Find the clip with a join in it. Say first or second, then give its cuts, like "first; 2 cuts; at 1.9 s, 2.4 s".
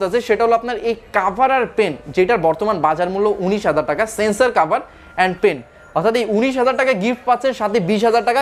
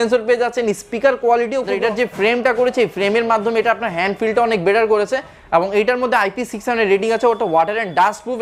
second; 1 cut; at 1.8 s